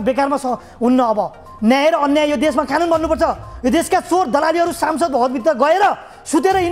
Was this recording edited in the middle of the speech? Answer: no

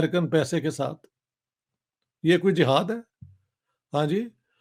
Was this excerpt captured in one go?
yes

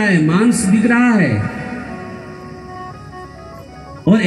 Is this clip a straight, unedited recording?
yes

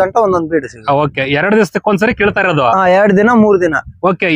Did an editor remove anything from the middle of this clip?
no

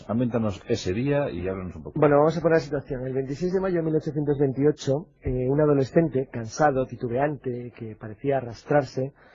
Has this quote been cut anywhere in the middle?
no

